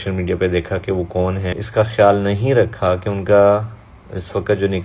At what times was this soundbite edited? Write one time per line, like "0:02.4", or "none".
none